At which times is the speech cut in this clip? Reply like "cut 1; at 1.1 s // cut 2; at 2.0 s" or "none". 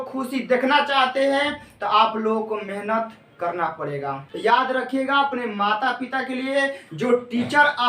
cut 1; at 4.3 s

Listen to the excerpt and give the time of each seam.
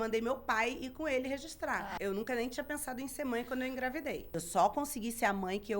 cut 1; at 1.9 s // cut 2; at 4.4 s

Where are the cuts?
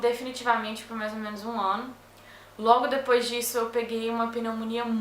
cut 1; at 2.0 s

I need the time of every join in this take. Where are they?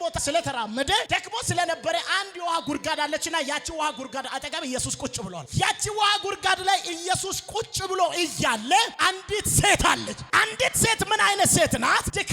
cut 1; at 10.2 s

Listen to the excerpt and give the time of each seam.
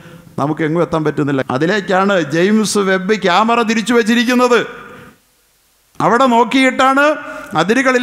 cut 1; at 1.4 s

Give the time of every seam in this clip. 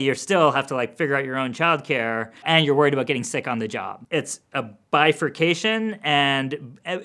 cut 1; at 2.4 s // cut 2; at 3.9 s

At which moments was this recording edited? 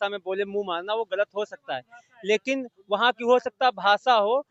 none

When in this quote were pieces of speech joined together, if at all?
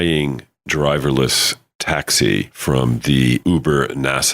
cut 1; at 2.5 s // cut 2; at 3.4 s

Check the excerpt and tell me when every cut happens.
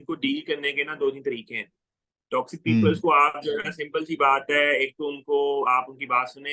none

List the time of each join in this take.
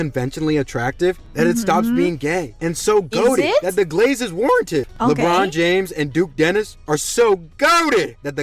cut 1; at 4.8 s

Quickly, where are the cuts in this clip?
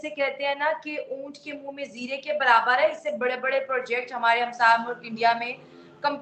none

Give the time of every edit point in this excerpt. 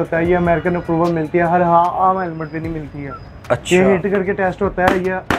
none

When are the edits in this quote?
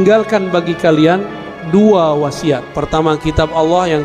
cut 1; at 2.7 s

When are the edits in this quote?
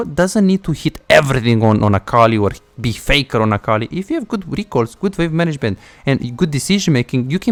none

